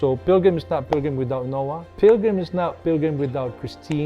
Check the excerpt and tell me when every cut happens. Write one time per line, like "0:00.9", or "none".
0:01.8